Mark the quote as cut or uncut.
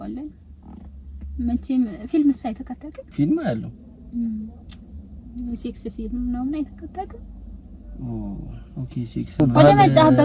cut